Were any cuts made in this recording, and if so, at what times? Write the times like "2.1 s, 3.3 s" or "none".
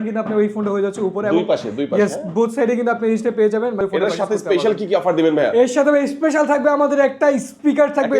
3.8 s